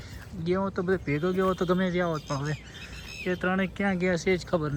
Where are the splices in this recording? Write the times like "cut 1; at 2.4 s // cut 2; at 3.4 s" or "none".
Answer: none